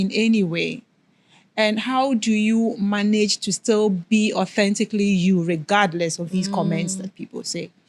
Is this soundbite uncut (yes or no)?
yes